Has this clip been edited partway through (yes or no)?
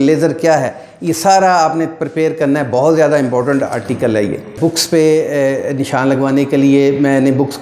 yes